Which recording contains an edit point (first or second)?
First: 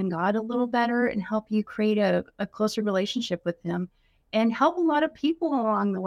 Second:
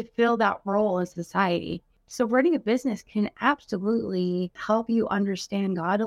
second